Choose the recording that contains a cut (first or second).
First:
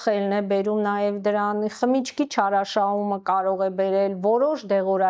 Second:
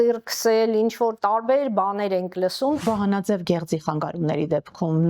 second